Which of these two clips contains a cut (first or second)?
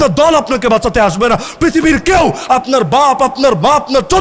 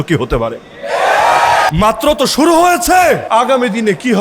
second